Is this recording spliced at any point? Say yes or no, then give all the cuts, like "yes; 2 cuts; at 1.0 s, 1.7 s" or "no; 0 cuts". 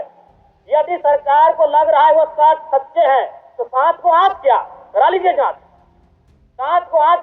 no; 0 cuts